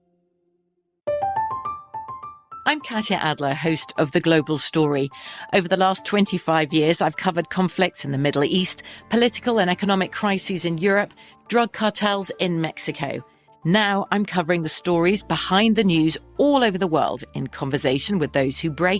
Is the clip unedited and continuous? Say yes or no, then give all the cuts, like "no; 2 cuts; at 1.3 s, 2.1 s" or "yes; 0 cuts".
no; 1 cut; at 0.9 s